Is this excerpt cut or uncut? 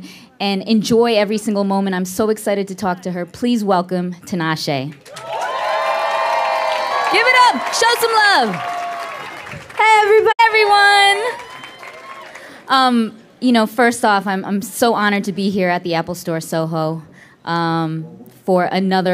uncut